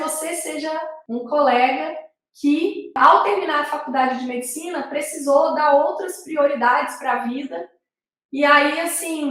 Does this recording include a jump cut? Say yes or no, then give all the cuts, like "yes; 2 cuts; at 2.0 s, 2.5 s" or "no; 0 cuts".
yes; 2 cuts; at 0.9 s, 3.0 s